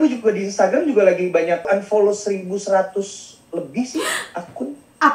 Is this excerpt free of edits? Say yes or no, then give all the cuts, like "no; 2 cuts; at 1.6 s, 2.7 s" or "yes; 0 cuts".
no; 1 cut; at 1.7 s